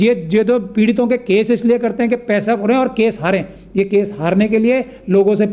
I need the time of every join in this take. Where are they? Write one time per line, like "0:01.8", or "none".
none